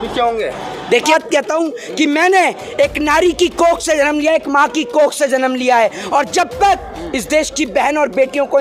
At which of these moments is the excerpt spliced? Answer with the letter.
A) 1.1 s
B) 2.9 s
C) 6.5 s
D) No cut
A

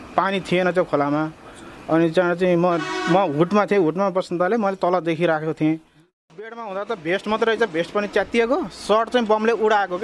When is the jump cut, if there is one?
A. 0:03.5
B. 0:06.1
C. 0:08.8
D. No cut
B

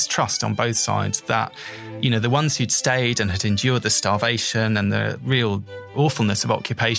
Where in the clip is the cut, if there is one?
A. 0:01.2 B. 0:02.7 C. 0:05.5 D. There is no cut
C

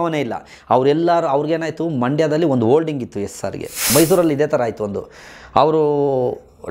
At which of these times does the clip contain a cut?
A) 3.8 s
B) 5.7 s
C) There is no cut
A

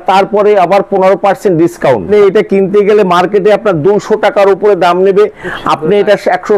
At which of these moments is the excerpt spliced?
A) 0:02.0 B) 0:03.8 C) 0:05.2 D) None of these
A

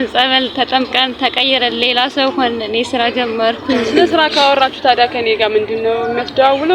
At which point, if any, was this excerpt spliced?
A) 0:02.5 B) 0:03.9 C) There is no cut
B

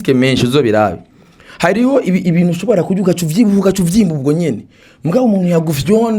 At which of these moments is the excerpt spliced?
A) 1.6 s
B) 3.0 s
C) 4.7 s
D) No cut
D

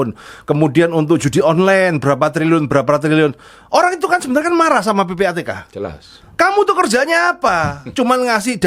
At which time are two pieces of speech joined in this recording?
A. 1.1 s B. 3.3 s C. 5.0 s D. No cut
D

